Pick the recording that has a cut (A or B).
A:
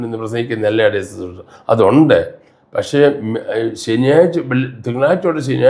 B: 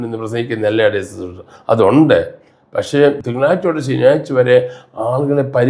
B